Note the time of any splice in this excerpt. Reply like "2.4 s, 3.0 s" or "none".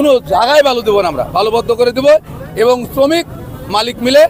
none